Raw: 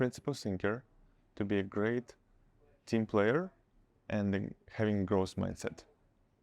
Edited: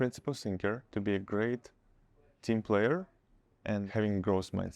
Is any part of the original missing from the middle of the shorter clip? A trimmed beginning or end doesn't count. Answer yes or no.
yes